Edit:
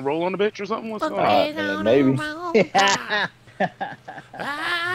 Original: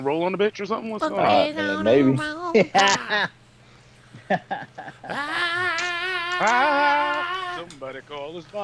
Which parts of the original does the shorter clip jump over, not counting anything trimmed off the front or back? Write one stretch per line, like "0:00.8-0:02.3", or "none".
0:03.4-0:04.1